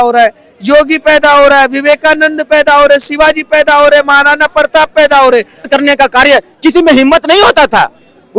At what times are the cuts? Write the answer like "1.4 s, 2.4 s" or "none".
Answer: 5.7 s